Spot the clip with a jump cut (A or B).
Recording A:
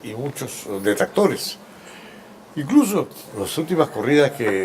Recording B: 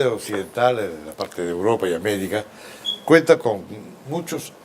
B